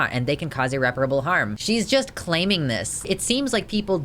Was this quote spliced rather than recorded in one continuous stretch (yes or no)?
yes